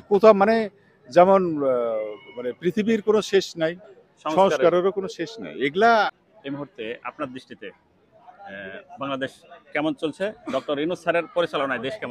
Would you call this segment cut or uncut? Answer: cut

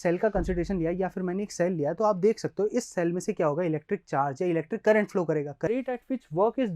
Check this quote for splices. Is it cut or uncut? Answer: cut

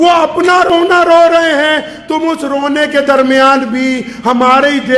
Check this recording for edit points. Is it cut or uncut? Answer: uncut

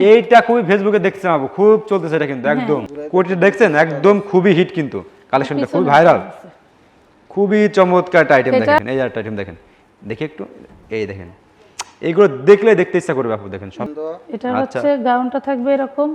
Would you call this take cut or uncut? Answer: cut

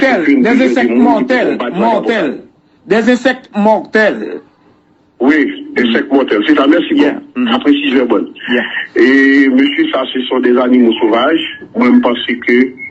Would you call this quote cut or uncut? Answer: uncut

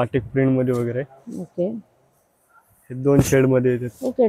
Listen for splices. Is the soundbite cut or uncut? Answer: uncut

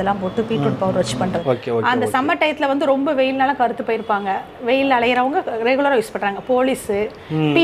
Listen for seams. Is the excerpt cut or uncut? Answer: cut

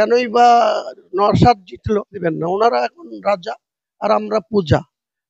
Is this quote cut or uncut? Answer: cut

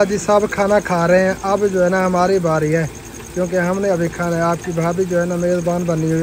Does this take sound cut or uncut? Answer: uncut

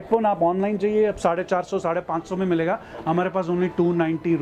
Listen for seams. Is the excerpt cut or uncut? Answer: uncut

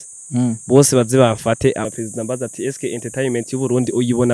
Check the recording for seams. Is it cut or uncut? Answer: cut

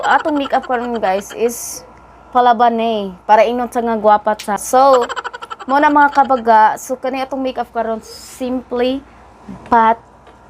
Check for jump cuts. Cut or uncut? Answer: cut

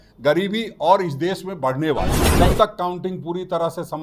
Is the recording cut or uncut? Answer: cut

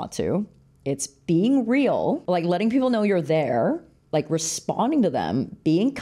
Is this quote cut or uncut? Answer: cut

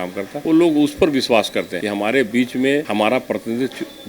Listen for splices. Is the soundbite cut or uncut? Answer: uncut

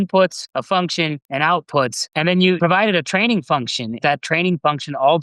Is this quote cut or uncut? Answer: cut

